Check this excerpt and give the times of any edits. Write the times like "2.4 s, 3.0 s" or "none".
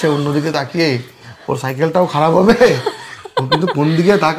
none